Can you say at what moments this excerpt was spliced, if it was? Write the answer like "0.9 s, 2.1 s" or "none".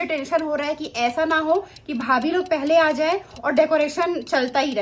none